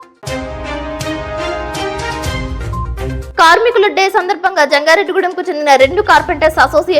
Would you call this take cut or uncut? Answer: cut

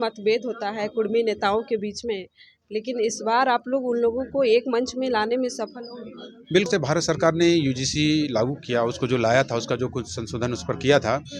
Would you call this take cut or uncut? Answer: cut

